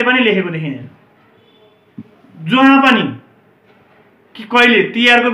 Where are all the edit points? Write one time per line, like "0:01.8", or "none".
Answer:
none